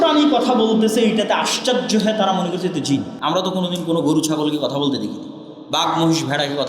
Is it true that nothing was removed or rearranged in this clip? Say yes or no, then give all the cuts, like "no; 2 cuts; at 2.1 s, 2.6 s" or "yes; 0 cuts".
no; 1 cut; at 3.1 s